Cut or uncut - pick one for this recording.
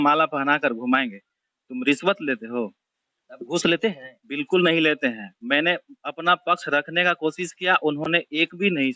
uncut